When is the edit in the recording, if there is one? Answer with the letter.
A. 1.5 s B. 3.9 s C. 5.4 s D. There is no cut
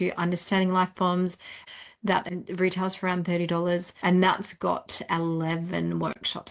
B